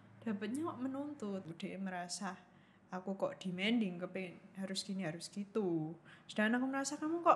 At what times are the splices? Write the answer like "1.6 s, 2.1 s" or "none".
1.4 s